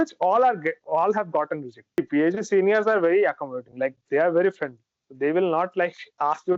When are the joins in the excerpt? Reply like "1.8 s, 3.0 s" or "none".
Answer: 2.0 s